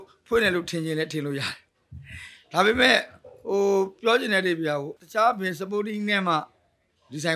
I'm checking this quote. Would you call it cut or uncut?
cut